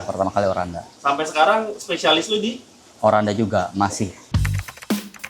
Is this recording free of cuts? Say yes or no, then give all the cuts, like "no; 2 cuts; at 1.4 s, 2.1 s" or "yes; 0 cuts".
no; 1 cut; at 4.2 s